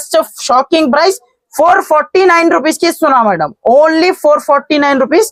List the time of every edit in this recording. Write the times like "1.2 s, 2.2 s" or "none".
none